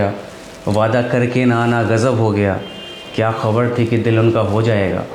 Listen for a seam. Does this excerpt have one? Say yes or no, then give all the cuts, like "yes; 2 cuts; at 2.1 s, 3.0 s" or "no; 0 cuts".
no; 0 cuts